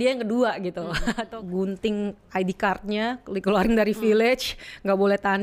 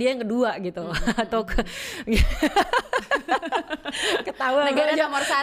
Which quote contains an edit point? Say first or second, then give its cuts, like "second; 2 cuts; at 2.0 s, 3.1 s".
first; 1 cut; at 1.2 s